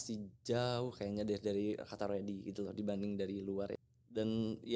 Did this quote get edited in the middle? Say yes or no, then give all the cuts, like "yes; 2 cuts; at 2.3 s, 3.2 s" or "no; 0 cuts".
yes; 1 cut; at 3.8 s